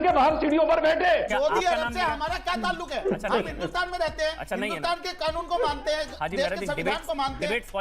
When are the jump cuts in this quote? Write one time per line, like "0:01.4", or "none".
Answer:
0:01.3